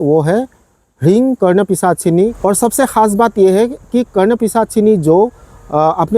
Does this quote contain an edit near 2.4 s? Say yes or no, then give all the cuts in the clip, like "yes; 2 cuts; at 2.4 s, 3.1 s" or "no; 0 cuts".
yes; 1 cut; at 2.4 s